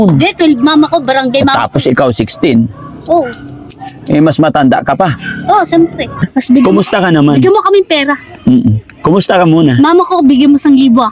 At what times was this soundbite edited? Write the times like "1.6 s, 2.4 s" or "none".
6.2 s

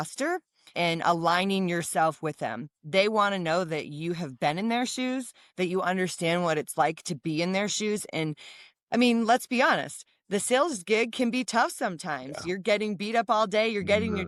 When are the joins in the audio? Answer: none

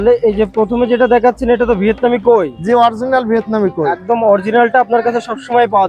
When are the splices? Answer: none

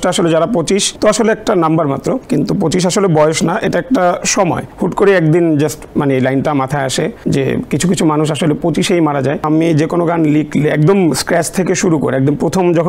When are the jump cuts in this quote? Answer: 0.9 s, 2.2 s, 4.7 s, 7.2 s, 9.4 s

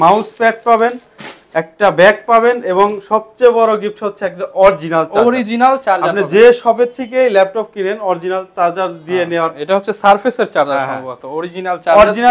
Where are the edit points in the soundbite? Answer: none

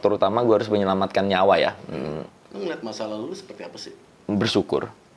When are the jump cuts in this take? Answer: 2.2 s

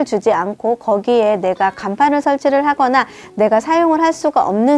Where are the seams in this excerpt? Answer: none

